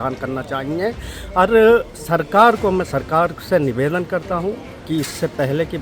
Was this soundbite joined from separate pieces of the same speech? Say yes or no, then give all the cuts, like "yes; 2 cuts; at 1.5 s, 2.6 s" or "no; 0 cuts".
yes; 1 cut; at 4.7 s